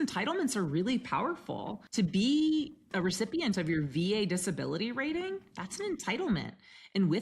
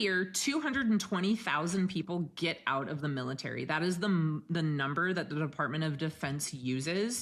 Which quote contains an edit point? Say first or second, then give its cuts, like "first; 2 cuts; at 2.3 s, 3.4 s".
first; 2 cuts; at 1.8 s, 2.9 s